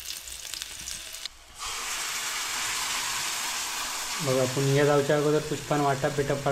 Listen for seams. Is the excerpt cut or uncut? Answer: cut